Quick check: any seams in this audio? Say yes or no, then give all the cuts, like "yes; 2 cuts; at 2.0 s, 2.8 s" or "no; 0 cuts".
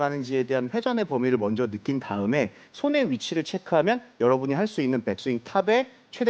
yes; 1 cut; at 2.7 s